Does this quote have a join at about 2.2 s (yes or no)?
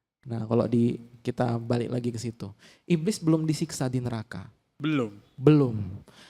no